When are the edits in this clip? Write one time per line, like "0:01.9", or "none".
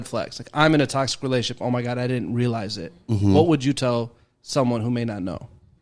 none